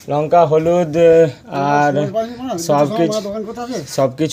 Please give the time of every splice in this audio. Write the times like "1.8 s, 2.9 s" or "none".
none